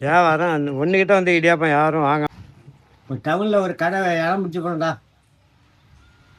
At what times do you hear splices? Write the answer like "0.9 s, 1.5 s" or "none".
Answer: 2.3 s